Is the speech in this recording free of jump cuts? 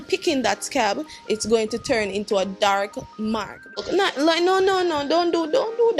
no; 1 cut; at 3.8 s

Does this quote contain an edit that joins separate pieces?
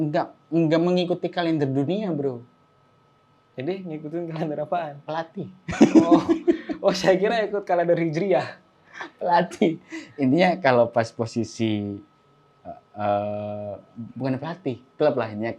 no; 0 cuts

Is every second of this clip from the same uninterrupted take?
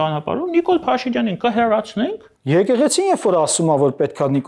no; 1 cut; at 2.3 s

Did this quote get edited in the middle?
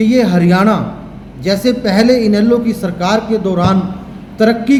no; 0 cuts

